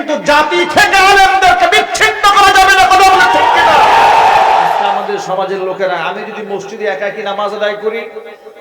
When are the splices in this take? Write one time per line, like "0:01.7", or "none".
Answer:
0:04.8